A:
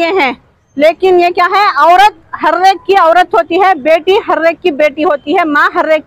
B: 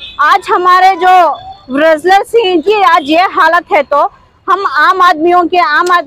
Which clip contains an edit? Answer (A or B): B